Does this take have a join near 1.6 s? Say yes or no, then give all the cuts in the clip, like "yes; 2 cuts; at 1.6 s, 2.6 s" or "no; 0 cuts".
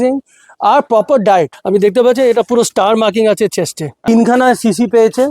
yes; 2 cuts; at 1.6 s, 4.1 s